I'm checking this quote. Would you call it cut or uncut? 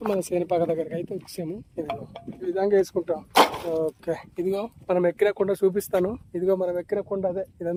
uncut